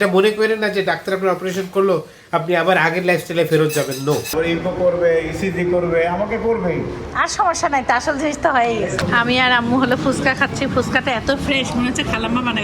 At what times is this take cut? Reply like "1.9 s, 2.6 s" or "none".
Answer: 4.3 s, 9.0 s